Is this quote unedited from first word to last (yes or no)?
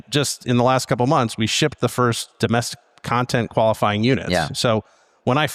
yes